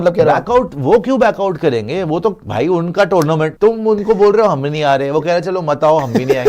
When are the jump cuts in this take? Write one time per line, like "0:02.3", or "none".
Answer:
0:03.5